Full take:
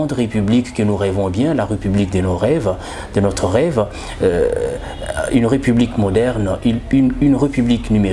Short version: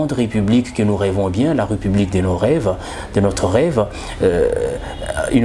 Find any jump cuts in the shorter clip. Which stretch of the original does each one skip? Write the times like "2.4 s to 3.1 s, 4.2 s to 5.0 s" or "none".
none

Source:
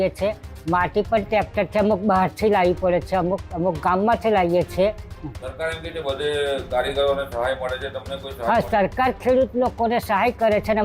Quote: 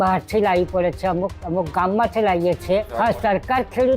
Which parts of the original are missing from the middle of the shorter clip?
5.0 s to 8.4 s

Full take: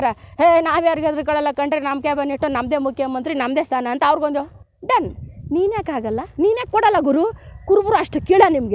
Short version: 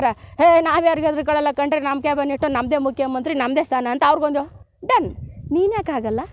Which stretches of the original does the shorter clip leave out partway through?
none

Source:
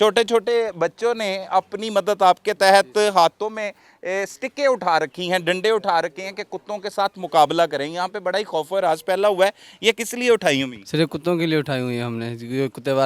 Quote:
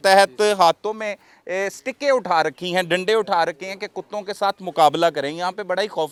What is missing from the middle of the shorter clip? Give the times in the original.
none

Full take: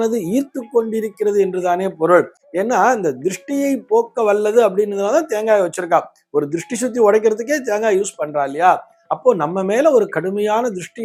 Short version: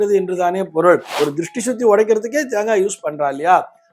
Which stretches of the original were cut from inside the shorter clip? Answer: 2.3 s to 6.2 s

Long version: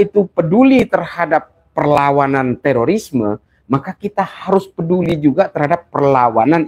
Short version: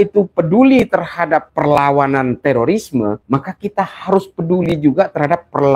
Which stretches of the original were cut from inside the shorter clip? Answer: 1.5 s to 1.7 s, 3.4 s to 3.6 s

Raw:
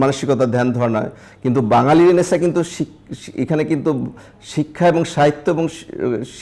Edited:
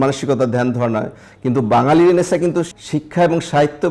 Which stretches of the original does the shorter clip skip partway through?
2.8 s to 4.4 s

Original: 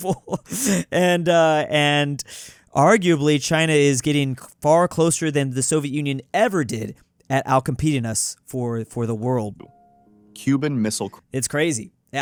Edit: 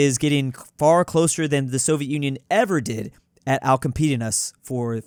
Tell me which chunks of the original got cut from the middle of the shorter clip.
none

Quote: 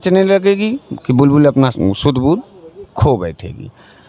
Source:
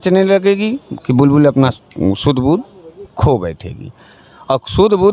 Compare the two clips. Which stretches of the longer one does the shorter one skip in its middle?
1.7 s to 2.0 s

